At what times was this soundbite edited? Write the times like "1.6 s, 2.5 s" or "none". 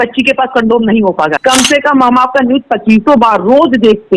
1.4 s

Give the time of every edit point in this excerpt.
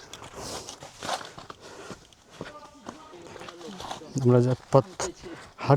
3.1 s

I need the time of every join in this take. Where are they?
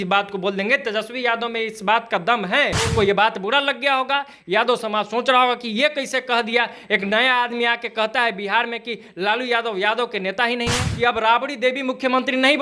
2.9 s, 10.9 s

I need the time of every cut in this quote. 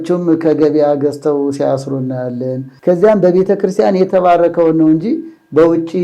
2.7 s

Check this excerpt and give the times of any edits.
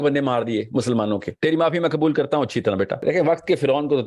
1.3 s, 3.0 s

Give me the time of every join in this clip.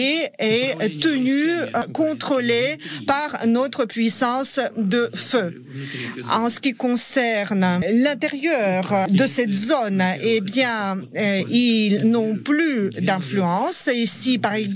7.8 s

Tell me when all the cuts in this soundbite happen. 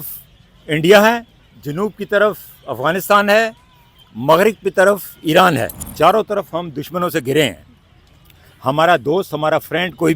1.3 s, 5.8 s

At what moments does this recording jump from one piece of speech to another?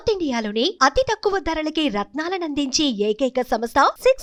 none

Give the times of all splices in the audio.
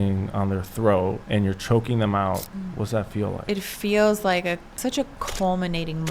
1.2 s, 2.5 s, 3.4 s, 4.8 s

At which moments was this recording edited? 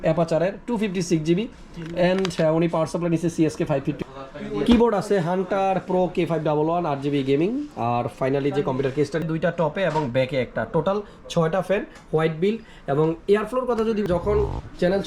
4.0 s, 9.2 s, 14.0 s

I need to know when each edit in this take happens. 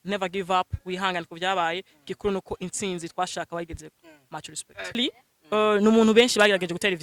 5.0 s

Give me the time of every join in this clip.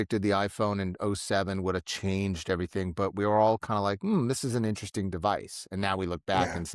none

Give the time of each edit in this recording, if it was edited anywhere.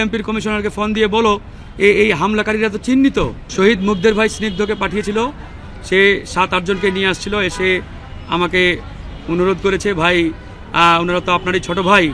3.4 s

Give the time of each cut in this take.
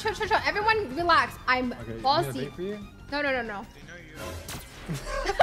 1.3 s

